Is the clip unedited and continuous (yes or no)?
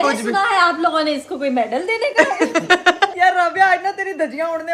no